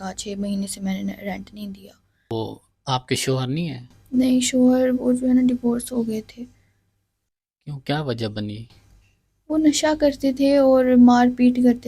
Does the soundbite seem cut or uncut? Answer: cut